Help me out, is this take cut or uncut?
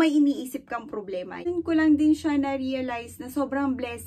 cut